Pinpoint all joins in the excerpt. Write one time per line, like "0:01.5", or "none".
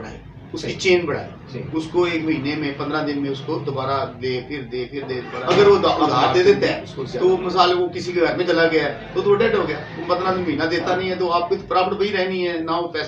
0:05.3